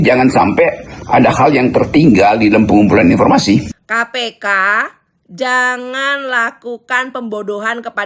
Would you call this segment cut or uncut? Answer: cut